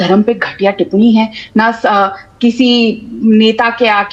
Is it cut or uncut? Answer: uncut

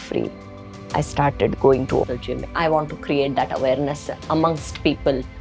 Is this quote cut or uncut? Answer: cut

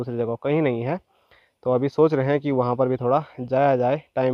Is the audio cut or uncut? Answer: uncut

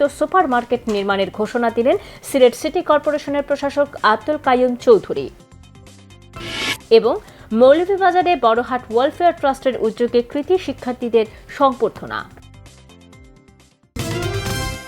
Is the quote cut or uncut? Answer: cut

